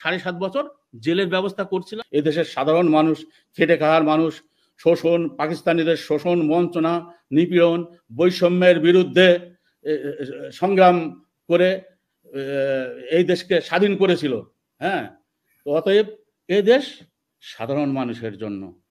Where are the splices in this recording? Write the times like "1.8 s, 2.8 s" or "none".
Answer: 2.0 s